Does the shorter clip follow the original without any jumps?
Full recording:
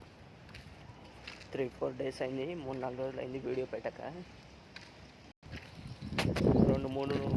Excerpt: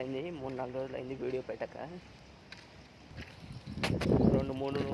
no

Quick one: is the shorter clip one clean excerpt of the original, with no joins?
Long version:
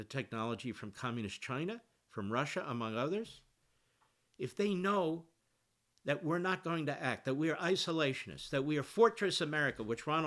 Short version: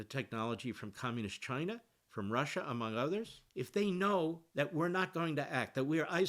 no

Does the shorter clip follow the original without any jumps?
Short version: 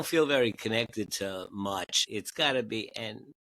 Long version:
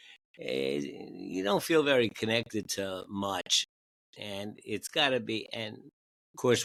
no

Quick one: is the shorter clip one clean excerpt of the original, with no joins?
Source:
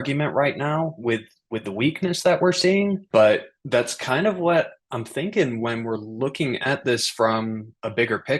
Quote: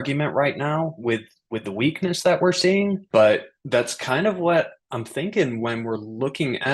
yes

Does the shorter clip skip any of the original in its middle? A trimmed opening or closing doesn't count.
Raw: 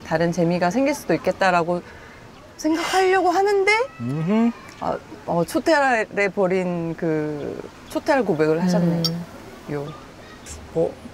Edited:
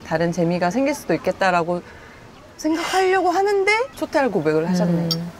yes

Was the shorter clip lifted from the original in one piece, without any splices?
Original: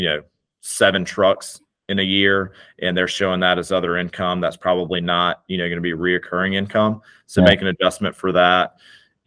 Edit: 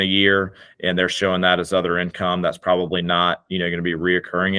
yes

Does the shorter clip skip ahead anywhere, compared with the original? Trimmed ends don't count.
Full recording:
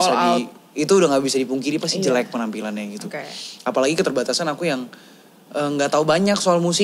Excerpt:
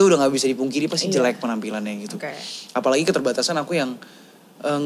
no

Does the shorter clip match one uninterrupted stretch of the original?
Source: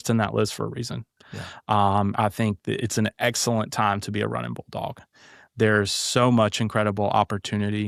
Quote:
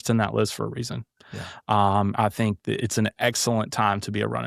yes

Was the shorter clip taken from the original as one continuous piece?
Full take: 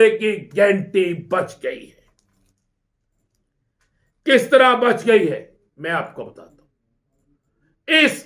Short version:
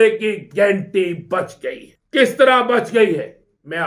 no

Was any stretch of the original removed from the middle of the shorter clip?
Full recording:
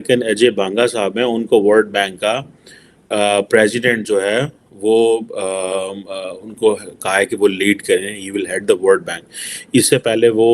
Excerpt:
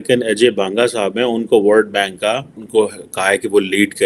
yes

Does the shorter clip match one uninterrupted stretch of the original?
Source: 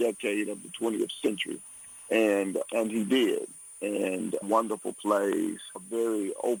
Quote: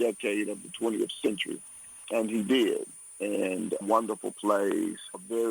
no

